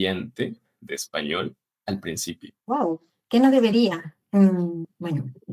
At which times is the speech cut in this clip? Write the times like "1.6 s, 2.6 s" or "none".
none